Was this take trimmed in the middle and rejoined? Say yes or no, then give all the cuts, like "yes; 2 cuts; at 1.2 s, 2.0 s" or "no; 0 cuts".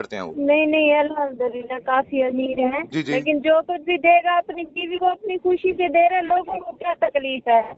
no; 0 cuts